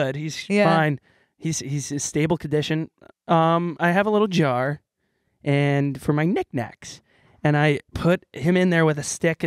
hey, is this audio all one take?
yes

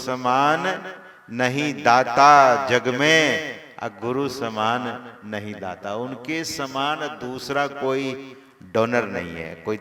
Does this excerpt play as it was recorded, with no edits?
yes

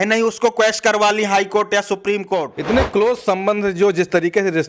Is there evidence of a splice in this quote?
yes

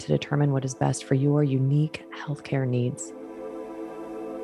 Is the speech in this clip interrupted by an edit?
yes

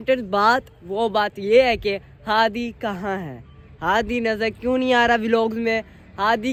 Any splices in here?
no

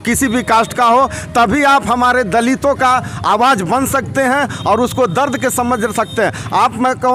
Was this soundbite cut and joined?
no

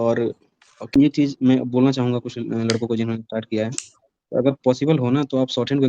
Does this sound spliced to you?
yes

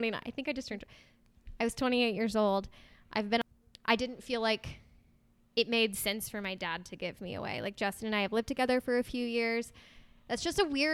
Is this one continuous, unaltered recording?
no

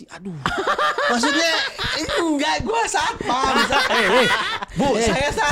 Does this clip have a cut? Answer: no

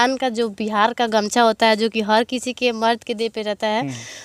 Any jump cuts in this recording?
no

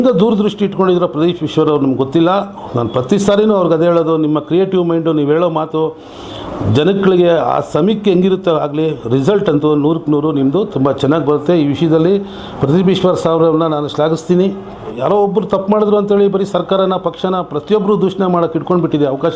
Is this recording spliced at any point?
yes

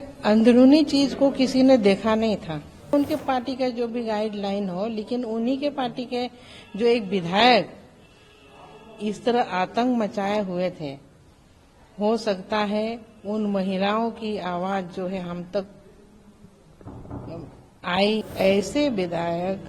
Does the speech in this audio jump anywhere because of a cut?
yes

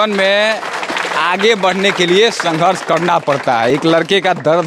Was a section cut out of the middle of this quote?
no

